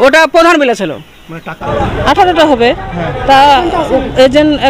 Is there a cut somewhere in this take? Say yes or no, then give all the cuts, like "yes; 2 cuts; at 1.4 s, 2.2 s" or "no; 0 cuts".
yes; 1 cut; at 1.5 s